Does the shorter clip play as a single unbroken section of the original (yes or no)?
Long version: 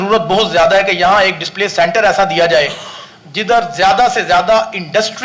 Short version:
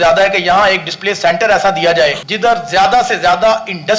no